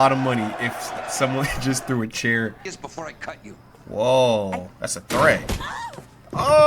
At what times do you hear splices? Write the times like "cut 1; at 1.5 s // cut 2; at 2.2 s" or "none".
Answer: cut 1; at 2.7 s